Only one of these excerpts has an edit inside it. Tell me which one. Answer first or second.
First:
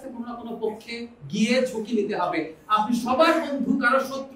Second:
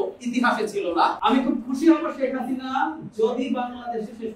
second